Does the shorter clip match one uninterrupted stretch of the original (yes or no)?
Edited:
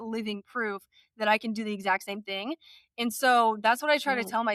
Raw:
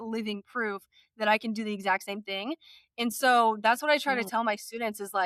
yes